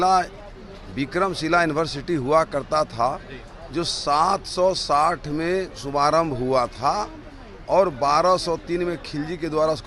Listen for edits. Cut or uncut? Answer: uncut